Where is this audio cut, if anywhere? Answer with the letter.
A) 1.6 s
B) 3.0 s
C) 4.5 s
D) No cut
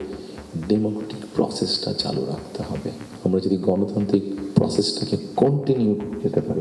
B